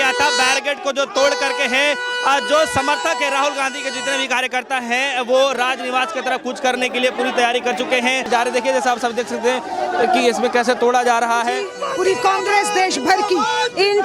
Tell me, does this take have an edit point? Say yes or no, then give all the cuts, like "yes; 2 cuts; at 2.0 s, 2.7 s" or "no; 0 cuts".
yes; 1 cut; at 11.8 s